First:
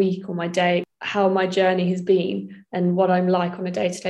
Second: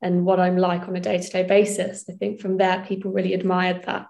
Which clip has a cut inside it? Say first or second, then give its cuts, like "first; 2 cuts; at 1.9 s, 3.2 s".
first; 1 cut; at 0.9 s